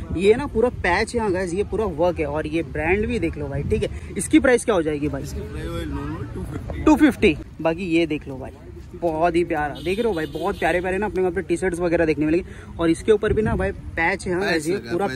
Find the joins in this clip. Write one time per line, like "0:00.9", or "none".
none